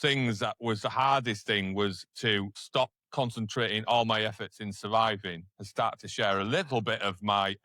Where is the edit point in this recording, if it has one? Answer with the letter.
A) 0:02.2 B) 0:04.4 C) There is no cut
C